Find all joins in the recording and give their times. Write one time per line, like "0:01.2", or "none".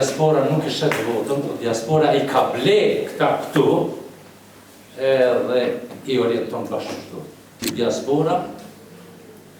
0:07.6